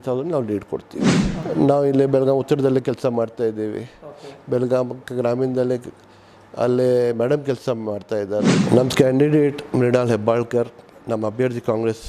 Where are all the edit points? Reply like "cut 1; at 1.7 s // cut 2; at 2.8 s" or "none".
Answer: cut 1; at 1.3 s // cut 2; at 8.6 s